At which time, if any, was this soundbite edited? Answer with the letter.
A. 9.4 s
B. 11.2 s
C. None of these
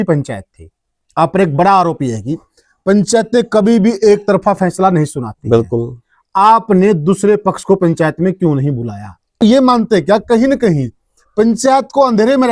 A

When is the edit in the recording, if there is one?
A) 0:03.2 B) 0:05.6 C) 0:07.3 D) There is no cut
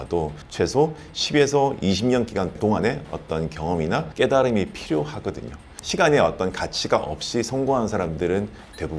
D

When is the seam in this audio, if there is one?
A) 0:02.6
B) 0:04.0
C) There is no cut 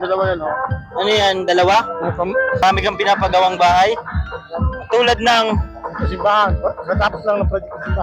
A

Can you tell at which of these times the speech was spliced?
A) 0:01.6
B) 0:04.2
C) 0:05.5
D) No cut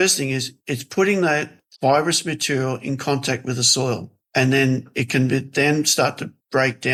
D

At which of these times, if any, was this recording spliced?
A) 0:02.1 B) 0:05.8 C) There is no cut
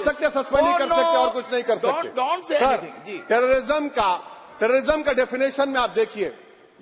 C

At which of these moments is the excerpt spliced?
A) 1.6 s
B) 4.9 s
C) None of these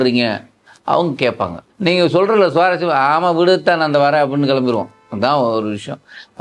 A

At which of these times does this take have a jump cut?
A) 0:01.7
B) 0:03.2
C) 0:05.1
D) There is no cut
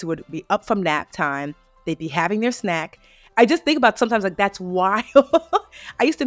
B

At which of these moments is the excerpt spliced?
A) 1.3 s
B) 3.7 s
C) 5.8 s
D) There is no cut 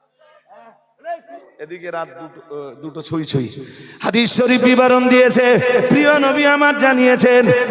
A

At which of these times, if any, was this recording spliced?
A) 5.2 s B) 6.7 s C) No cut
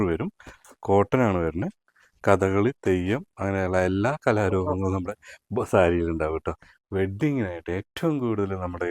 B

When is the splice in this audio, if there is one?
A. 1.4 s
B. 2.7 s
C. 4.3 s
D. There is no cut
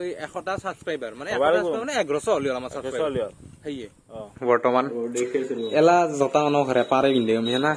C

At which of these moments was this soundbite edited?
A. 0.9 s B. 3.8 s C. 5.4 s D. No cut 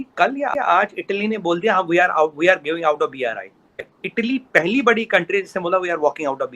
B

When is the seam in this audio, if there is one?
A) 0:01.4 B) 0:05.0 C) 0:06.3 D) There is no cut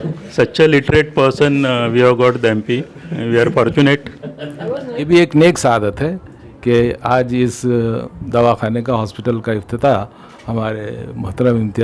B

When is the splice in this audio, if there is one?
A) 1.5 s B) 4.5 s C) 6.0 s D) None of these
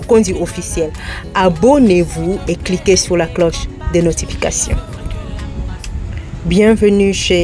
C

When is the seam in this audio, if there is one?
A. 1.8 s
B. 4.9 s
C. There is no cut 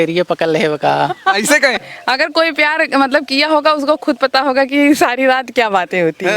A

